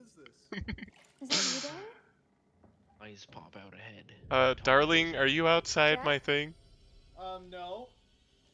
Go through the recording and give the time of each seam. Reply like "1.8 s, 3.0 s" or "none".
none